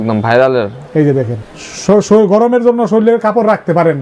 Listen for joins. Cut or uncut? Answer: cut